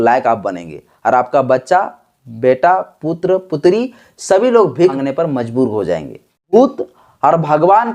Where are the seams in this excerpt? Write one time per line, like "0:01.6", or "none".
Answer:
0:05.0
0:06.5

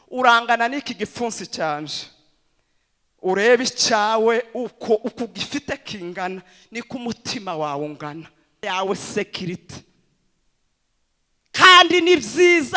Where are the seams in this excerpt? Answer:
0:08.6

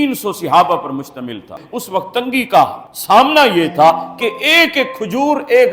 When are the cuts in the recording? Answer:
0:01.5

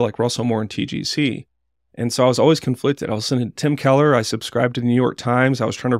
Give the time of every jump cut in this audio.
none

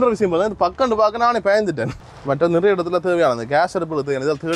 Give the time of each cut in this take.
0:01.9

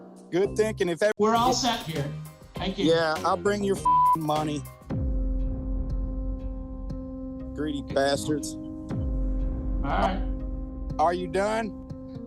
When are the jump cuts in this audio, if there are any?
0:01.1

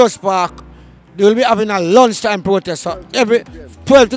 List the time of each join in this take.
none

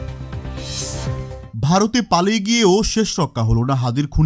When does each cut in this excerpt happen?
0:01.5

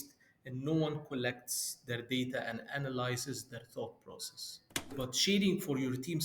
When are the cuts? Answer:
0:04.9

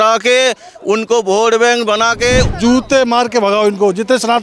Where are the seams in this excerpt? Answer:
0:02.5

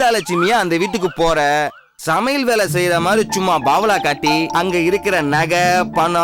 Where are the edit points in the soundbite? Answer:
none

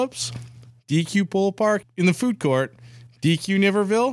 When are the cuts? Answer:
0:01.8

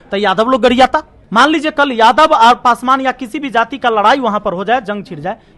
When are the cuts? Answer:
0:01.2

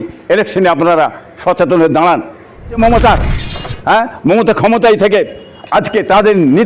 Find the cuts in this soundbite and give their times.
0:02.8

